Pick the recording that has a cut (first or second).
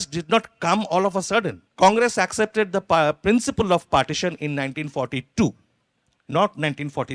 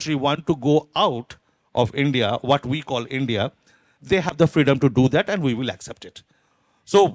first